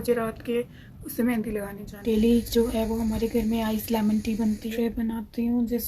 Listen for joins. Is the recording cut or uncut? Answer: cut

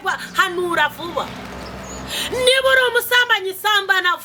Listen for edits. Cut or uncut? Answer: uncut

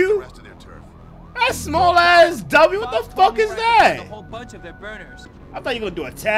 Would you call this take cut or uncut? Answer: cut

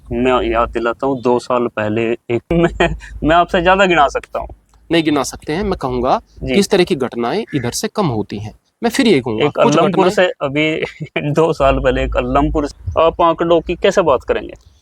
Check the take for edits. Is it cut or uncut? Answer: cut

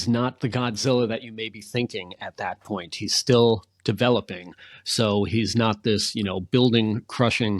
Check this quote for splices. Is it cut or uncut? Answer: uncut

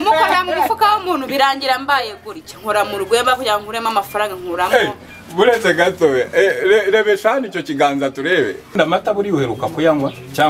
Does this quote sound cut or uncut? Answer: cut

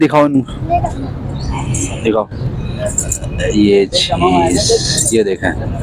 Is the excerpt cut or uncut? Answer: uncut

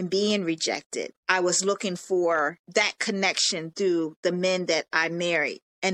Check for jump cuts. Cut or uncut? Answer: cut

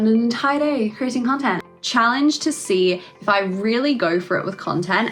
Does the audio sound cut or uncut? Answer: cut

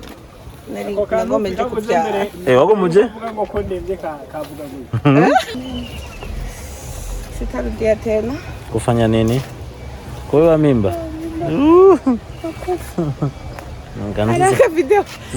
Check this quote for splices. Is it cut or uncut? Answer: cut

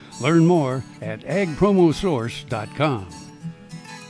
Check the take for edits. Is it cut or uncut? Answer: cut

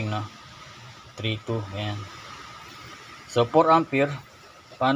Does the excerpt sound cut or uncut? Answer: uncut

